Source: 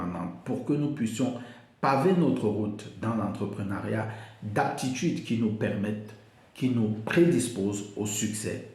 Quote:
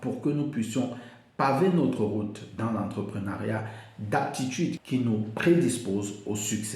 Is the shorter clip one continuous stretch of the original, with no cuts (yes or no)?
no